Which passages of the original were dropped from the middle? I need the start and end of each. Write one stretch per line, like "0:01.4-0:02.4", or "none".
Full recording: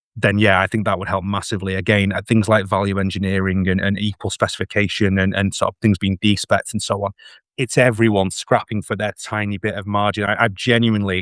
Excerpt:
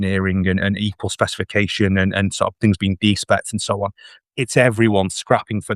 none